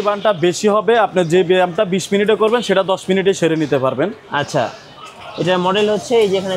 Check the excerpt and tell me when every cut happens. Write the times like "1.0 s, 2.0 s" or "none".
none